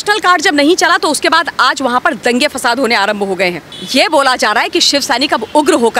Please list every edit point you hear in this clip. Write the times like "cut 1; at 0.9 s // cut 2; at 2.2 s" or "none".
cut 1; at 3.7 s

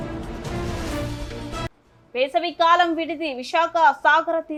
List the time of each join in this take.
none

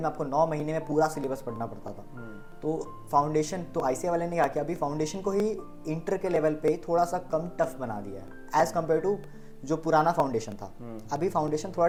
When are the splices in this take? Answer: none

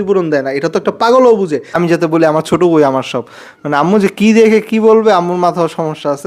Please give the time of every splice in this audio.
cut 1; at 1.8 s

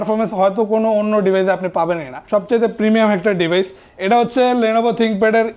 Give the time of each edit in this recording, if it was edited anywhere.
cut 1; at 2.1 s

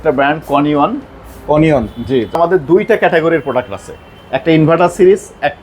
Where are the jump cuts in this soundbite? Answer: cut 1; at 2.4 s

